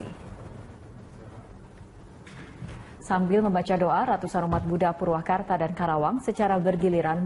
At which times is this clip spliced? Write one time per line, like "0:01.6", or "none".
none